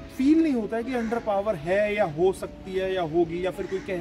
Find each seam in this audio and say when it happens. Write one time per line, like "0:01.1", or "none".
none

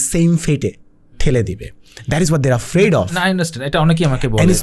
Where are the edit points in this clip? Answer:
none

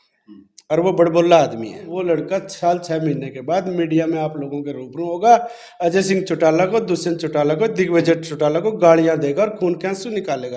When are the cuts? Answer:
0:01.9

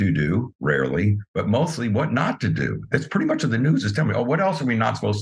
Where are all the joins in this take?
none

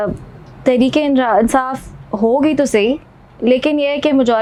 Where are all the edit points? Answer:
none

